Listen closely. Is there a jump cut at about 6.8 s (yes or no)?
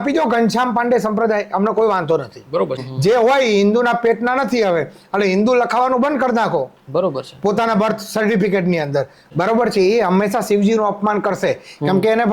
no